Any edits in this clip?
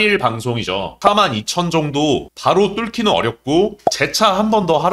yes; 1 cut; at 1.0 s

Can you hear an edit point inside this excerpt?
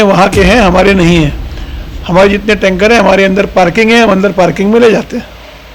no; 0 cuts

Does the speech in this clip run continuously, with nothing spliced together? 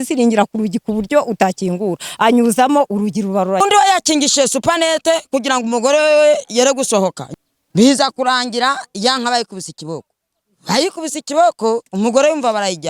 no; 2 cuts; at 3.6 s, 7.2 s

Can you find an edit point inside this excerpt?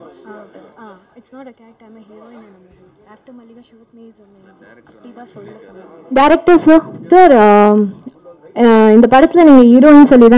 yes; 2 cuts; at 5.9 s, 7.0 s

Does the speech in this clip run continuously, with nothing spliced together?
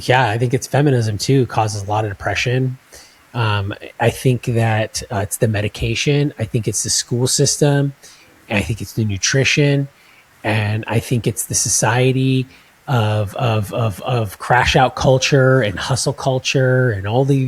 yes; 0 cuts

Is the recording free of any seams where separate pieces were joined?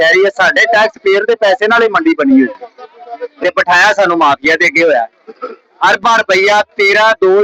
yes; 0 cuts

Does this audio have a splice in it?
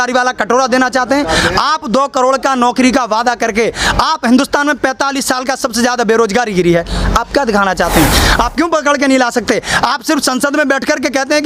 yes; 1 cut; at 8.2 s

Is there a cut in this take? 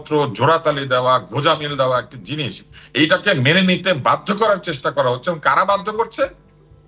no; 0 cuts

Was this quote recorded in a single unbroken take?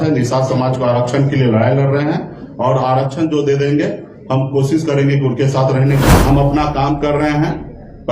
no; 1 cut; at 6.1 s

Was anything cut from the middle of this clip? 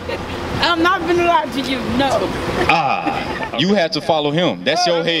yes; 1 cut; at 3.4 s

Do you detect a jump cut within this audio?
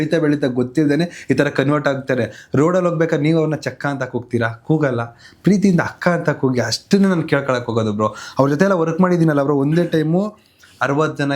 no; 0 cuts

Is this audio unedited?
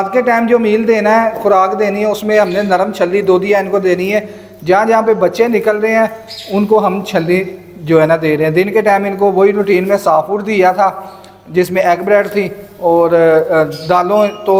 yes; 0 cuts

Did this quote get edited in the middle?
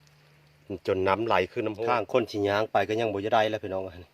yes; 1 cut; at 1.8 s

